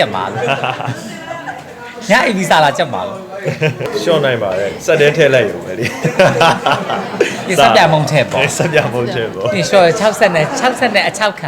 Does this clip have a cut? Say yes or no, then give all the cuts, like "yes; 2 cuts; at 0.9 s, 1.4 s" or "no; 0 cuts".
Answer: yes; 1 cut; at 3.9 s